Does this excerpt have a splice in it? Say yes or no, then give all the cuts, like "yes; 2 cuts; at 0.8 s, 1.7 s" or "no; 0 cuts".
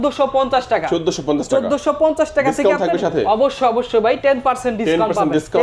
no; 0 cuts